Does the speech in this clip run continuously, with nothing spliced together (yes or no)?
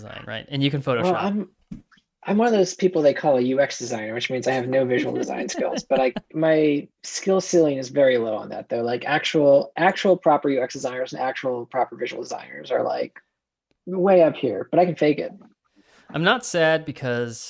no